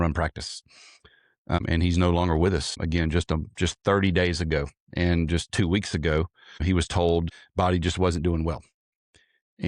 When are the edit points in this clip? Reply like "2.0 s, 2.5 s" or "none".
7.4 s